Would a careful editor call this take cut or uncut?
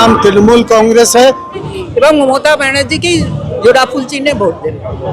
cut